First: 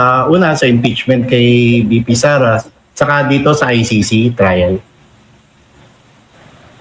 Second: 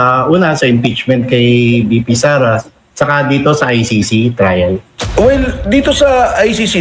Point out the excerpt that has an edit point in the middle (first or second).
second